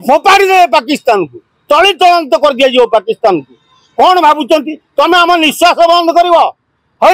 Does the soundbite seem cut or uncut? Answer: uncut